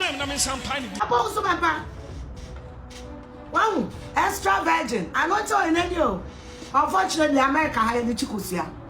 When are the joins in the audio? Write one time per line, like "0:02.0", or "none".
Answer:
0:01.0